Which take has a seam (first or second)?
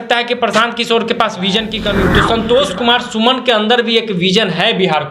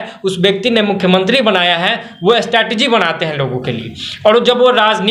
first